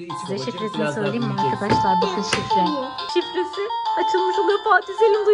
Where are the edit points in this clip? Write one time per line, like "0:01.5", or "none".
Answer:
0:03.1

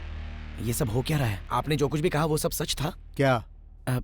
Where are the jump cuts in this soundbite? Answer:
0:01.4

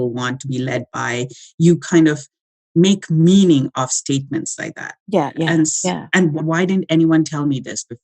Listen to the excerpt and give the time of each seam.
0:06.4

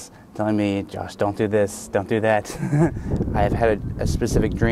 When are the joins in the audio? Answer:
0:03.0

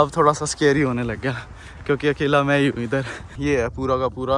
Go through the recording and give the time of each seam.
0:03.2

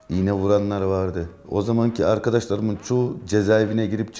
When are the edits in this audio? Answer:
none

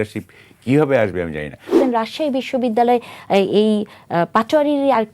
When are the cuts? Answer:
0:01.8

